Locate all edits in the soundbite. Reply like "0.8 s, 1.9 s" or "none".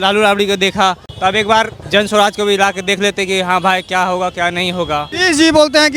1.1 s, 1.8 s, 5.1 s